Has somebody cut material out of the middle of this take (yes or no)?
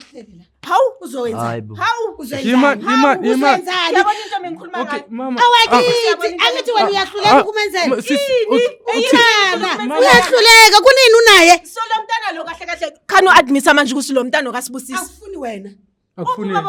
no